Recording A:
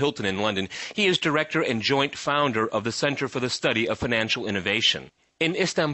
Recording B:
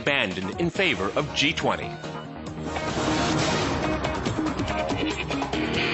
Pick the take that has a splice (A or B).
A